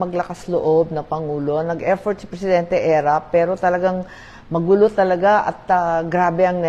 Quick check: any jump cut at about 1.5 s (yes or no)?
no